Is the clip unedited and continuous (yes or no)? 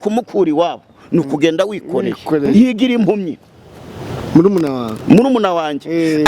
no